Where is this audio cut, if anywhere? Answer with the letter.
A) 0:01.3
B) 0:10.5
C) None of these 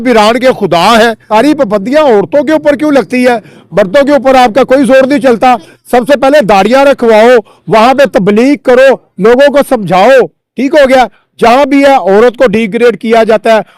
A